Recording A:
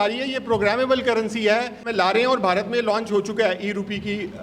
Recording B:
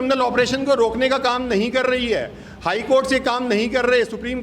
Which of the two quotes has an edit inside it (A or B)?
A